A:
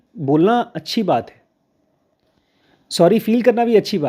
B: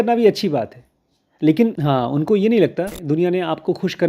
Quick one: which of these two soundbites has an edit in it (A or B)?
B